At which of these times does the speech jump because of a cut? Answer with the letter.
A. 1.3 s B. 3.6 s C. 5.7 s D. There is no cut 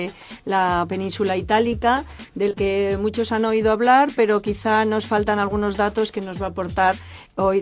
D